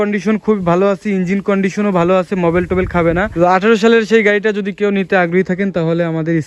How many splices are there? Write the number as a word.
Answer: one